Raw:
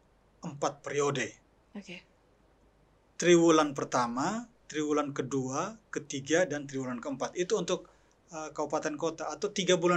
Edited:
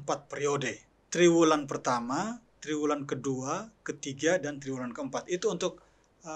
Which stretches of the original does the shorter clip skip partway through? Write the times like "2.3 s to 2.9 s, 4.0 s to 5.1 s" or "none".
1.5 s to 3.0 s